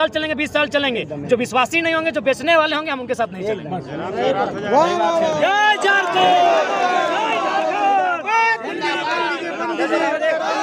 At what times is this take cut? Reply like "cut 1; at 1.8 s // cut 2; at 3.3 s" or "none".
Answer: none